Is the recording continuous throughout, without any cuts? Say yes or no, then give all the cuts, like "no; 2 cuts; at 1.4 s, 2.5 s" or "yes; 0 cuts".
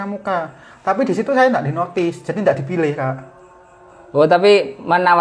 yes; 0 cuts